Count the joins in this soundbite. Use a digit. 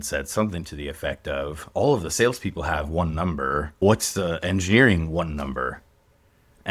1